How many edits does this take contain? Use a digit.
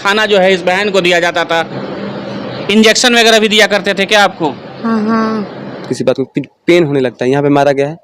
2